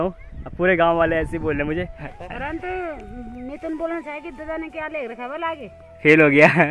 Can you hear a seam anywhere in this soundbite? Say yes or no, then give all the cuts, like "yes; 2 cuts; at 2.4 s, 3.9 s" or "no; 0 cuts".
yes; 1 cut; at 2.2 s